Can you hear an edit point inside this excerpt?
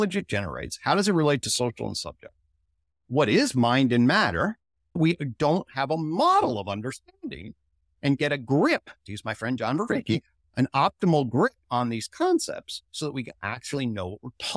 yes; 1 cut; at 5.0 s

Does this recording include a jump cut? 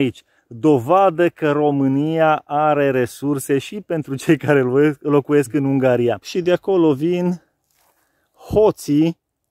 yes; 1 cut; at 6.3 s

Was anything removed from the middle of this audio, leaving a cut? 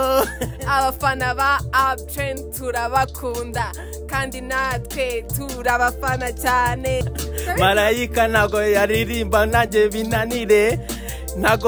yes; 1 cut; at 7.2 s

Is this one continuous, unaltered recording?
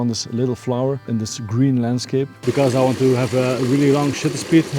no; 2 cuts; at 1.1 s, 2.3 s

